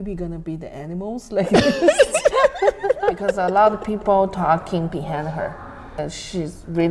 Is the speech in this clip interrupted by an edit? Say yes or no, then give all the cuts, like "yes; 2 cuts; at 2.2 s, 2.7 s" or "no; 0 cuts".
yes; 2 cuts; at 3.3 s, 6.0 s